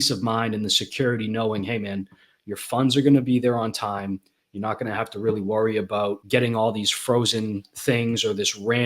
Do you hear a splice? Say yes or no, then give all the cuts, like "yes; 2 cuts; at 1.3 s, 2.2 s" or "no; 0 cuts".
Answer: yes; 1 cut; at 6.2 s